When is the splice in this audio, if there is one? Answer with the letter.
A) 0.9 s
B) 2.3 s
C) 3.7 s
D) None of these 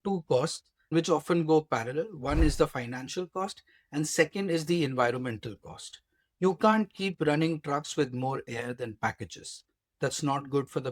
A